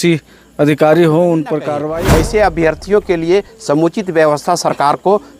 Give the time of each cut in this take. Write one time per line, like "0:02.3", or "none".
0:01.7